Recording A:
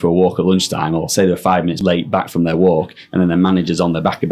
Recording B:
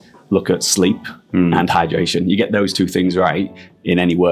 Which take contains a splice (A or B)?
A